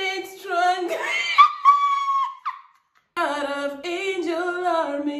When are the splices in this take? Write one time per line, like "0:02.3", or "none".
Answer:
0:03.2